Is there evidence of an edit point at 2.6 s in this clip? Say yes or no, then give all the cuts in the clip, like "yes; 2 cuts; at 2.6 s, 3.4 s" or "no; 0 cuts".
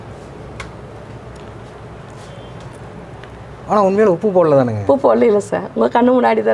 no; 0 cuts